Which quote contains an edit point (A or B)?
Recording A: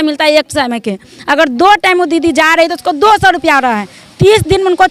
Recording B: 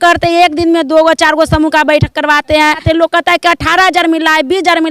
B